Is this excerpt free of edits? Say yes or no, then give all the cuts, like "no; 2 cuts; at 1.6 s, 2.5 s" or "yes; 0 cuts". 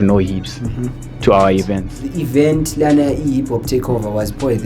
no; 1 cut; at 1.6 s